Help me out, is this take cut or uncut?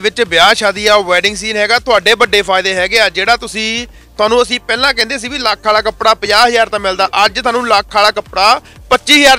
uncut